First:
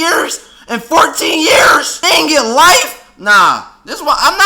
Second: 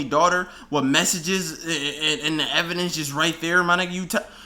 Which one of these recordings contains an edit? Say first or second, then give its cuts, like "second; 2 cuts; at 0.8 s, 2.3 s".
first; 1 cut; at 1.9 s